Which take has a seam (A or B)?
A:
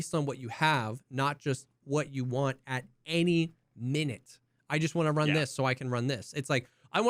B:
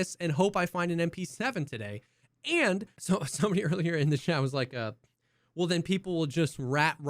B